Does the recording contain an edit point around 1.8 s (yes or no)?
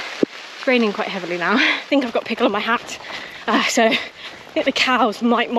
yes